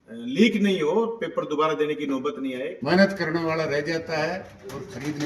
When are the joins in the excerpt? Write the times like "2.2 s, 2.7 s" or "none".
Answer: 2.7 s